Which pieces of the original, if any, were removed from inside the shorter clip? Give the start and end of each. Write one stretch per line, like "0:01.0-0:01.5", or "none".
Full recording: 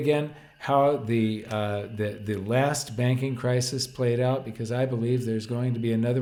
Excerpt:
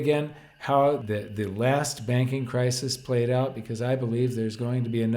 0:01.0-0:01.9

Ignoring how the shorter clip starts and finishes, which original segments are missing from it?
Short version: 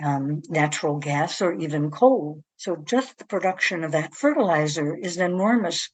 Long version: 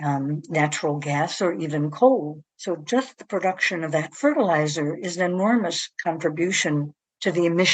none

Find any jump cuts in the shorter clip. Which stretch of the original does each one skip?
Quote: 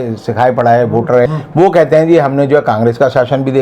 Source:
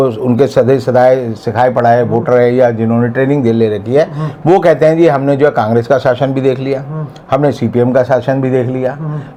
0:02.4-0:04.2

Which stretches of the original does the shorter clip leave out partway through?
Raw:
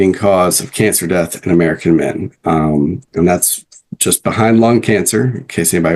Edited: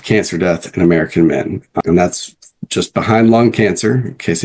0:02.4-0:03.0

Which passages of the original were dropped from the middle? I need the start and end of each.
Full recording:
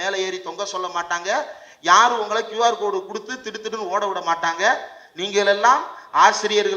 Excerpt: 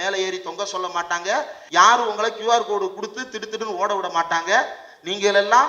0:01.6-0:01.7

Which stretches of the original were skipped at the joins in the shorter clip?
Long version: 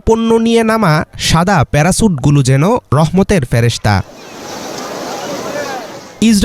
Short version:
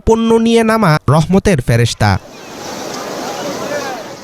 0:01.0-0:02.9

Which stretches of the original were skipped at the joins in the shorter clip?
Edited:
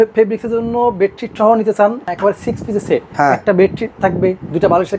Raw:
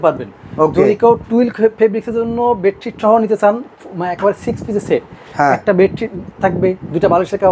0:03.7-0:04.1
0:05.1-0:05.3
0:06.1-0:06.3

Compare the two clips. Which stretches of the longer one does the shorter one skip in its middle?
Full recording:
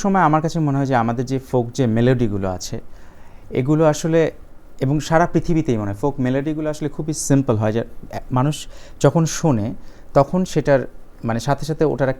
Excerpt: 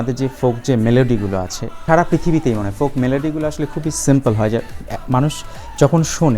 0:02.9-0:05.0

